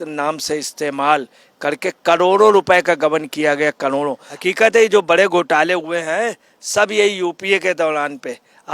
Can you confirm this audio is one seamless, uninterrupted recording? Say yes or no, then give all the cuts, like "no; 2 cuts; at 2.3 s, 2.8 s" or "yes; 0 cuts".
no; 1 cut; at 4.3 s